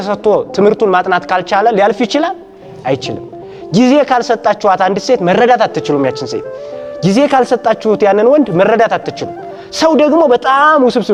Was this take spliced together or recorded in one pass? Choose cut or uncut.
uncut